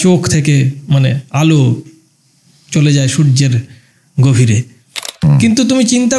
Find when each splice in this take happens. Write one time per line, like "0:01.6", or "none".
0:05.1